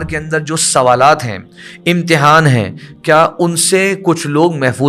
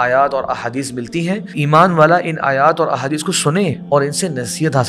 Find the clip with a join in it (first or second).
second